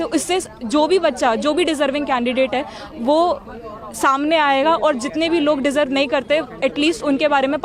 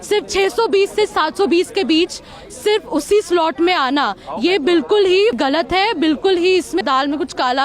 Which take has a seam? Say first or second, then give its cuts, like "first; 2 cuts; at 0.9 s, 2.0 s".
second; 2 cuts; at 5.4 s, 6.8 s